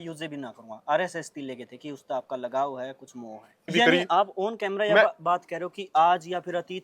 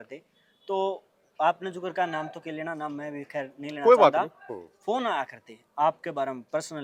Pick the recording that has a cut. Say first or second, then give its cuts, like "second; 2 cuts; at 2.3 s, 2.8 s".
first; 1 cut; at 3.7 s